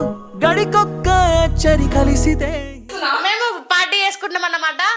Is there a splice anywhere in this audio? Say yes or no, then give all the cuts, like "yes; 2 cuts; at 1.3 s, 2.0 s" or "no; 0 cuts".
yes; 1 cut; at 2.9 s